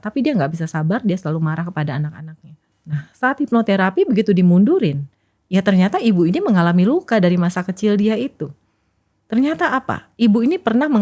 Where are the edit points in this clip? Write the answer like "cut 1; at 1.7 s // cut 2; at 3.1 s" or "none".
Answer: none